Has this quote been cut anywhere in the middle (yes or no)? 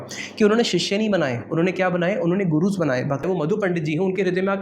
yes